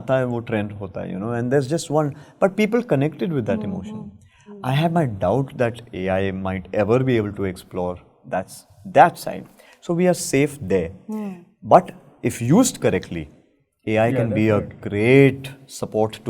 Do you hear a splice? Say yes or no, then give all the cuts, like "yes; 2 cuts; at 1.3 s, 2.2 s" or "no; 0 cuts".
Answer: no; 0 cuts